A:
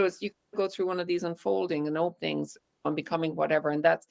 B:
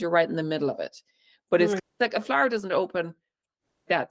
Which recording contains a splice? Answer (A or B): B